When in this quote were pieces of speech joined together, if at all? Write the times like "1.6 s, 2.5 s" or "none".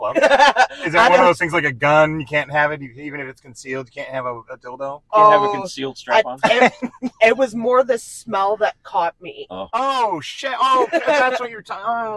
none